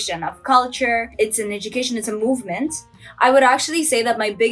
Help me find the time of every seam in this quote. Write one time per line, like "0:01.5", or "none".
0:03.0

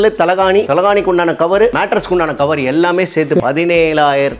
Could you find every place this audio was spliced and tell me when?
0:03.4

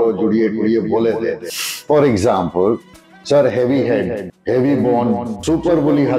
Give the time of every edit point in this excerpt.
0:04.2
0:05.4

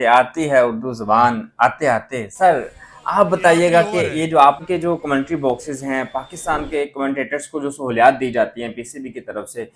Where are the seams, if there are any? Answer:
0:04.6

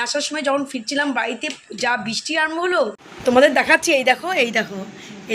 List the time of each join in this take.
0:03.0

